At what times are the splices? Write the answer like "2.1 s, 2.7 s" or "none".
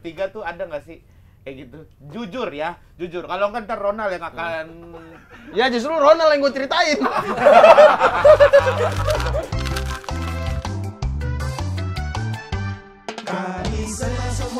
9.5 s